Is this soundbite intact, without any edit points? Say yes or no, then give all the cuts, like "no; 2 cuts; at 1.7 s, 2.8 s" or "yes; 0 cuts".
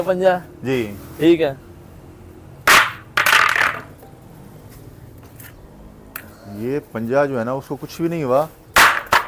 yes; 0 cuts